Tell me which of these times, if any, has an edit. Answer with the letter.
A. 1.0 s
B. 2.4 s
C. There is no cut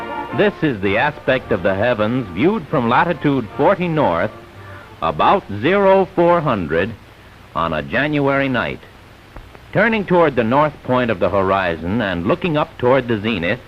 B